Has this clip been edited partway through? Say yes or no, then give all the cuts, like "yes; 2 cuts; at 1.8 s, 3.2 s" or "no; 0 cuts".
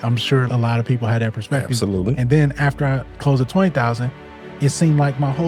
no; 0 cuts